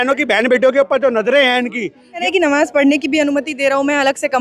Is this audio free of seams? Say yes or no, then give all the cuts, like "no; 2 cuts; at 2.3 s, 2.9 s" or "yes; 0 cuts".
no; 1 cut; at 2.2 s